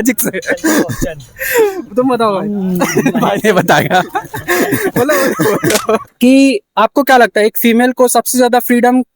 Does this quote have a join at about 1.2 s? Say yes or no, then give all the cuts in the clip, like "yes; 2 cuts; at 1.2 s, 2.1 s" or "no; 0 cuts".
no; 1 cut; at 6.1 s